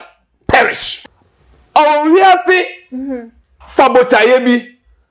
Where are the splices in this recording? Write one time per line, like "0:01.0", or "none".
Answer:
0:00.9